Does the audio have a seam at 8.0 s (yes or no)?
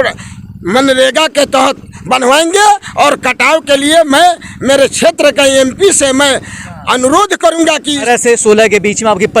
yes